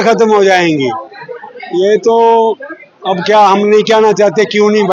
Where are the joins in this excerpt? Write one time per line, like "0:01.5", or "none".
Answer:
none